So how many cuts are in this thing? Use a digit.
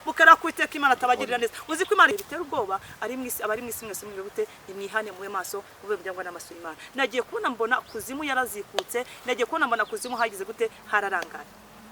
1